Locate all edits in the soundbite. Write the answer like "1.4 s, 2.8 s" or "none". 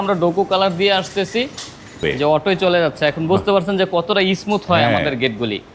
2.0 s